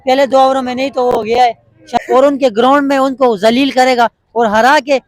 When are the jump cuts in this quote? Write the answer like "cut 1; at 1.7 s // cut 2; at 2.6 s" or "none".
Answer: cut 1; at 2.0 s